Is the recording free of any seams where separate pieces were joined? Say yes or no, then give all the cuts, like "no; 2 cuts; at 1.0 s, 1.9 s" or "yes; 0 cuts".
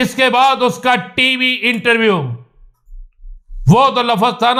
yes; 0 cuts